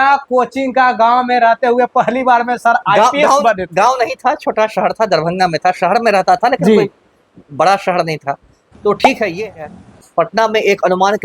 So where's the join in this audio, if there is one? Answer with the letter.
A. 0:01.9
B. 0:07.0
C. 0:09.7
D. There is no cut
C